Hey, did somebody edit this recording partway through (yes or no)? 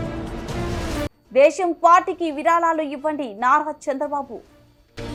no